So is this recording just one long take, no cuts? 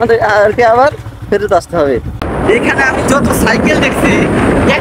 no; 1 cut; at 2.3 s

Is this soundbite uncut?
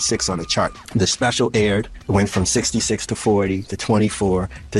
yes; 0 cuts

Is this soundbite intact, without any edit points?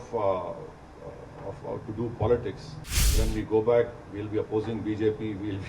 no; 1 cut; at 3.1 s

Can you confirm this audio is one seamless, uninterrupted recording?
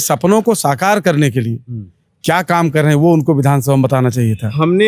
yes; 0 cuts

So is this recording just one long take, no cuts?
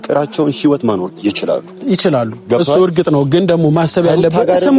yes; 0 cuts

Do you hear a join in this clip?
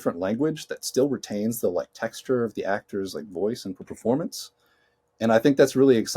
yes; 1 cut; at 3.9 s

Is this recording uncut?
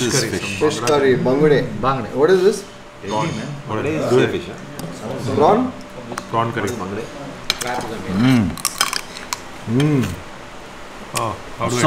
yes; 0 cuts

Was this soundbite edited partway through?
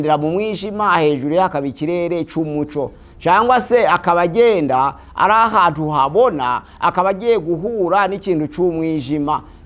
no; 0 cuts

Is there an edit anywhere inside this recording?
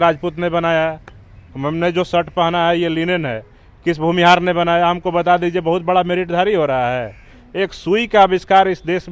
no; 0 cuts

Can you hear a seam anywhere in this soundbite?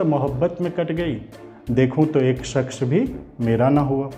no; 0 cuts

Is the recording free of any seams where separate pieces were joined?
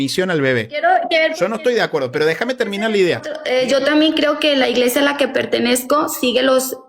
no; 1 cut; at 3.4 s

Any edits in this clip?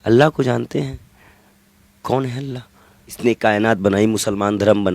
yes; 1 cut; at 3.2 s

